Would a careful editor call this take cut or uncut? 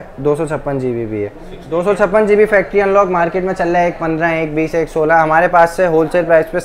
cut